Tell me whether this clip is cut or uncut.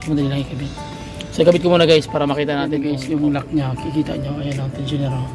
cut